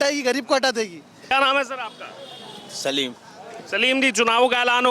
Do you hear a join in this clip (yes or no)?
yes